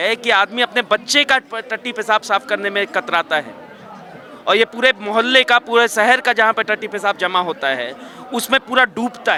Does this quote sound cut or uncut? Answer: uncut